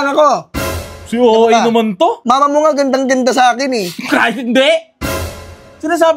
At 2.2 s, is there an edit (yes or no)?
yes